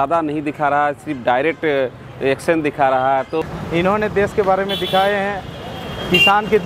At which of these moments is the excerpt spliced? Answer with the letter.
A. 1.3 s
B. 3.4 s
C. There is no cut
B